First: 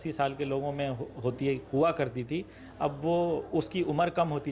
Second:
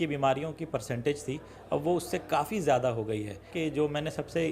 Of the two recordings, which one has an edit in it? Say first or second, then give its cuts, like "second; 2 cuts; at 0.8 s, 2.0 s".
second; 1 cut; at 3.5 s